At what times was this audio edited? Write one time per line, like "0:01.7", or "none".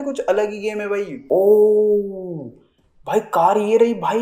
0:01.2